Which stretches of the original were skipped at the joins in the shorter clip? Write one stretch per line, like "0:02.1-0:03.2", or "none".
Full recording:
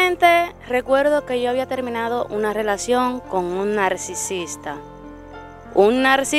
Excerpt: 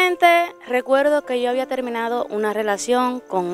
none